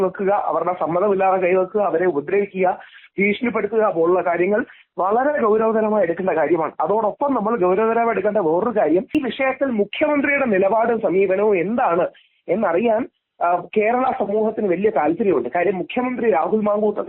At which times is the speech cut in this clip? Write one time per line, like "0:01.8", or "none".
0:09.1